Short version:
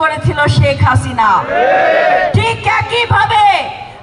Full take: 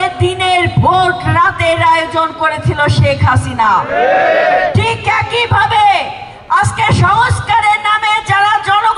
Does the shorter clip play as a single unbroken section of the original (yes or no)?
yes